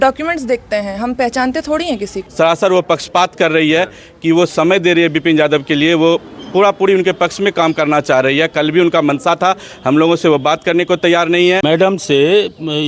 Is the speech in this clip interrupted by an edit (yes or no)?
yes